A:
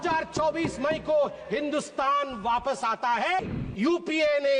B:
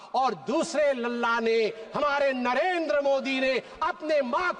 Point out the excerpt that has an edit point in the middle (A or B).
A